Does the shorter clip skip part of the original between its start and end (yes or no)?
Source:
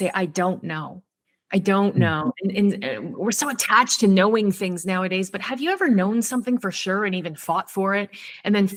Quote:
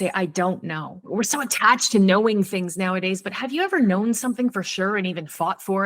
yes